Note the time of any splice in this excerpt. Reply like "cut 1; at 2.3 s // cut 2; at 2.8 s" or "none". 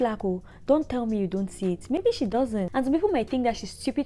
cut 1; at 2.7 s

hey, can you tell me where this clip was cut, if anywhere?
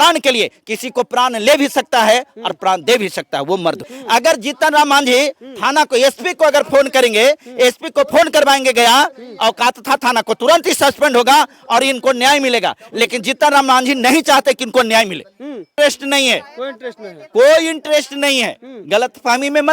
cut 1; at 3.9 s // cut 2; at 15.7 s

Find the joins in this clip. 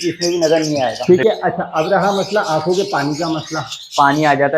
cut 1; at 1.0 s

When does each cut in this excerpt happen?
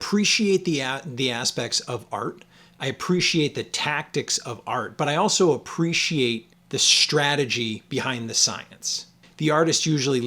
cut 1; at 9.2 s

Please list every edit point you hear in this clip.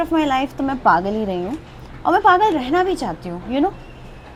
none

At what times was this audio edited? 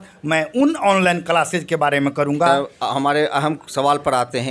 cut 1; at 2.5 s

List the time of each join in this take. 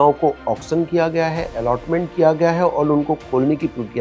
none

